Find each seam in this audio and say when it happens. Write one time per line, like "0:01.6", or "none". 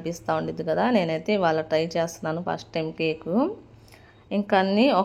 none

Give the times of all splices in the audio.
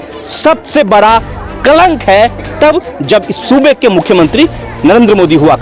none

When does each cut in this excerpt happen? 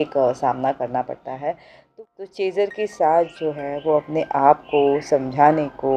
0:01.8

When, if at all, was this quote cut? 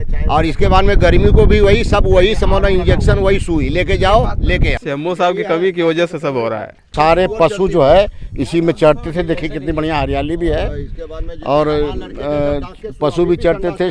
0:04.8
0:06.9

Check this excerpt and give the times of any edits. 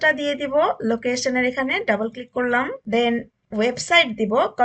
none

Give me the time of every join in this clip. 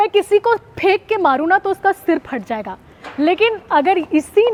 none

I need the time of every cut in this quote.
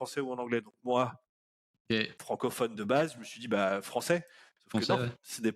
none

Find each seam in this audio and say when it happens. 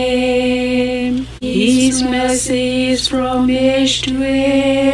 0:01.4

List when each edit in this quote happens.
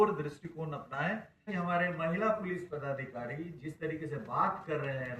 0:01.5

